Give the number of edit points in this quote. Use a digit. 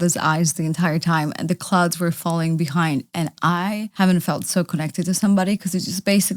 1